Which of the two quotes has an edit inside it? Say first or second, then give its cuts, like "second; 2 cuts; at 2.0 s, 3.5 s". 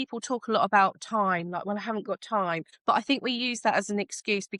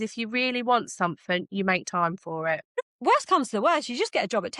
second; 1 cut; at 2.9 s